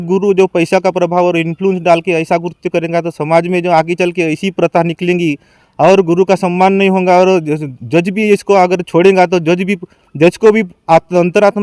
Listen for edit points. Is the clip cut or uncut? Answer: uncut